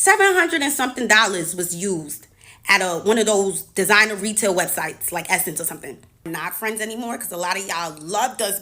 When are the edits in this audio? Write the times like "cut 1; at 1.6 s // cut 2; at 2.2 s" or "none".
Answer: cut 1; at 6.3 s